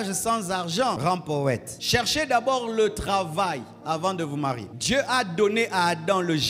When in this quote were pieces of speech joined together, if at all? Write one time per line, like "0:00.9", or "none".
0:01.0
0:01.7
0:04.7